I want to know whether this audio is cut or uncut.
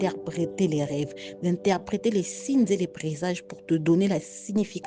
uncut